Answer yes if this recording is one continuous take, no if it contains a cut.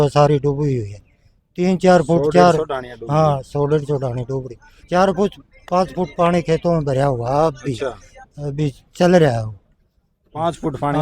yes